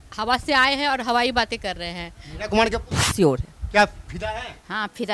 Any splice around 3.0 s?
yes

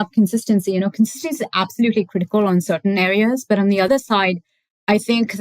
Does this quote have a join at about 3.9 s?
yes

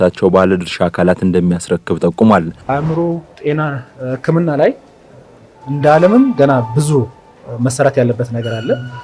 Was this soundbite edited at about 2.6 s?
yes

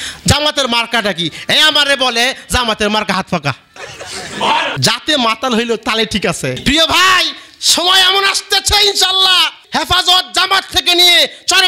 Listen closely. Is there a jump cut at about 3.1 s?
no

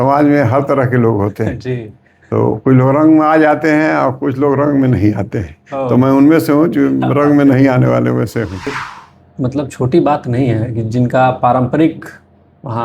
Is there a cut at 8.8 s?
yes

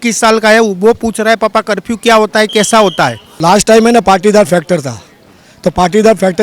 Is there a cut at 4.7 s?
no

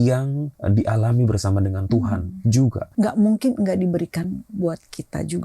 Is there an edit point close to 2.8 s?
yes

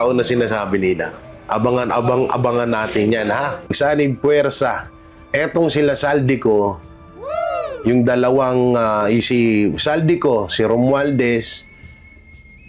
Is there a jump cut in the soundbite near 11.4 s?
no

